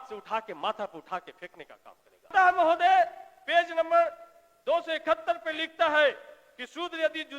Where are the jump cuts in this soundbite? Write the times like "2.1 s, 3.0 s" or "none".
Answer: 2.3 s